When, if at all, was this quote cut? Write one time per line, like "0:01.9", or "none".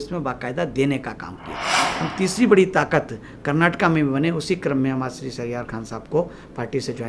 0:01.8